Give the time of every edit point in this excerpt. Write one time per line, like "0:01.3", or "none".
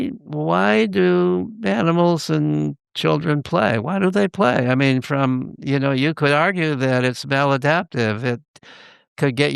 none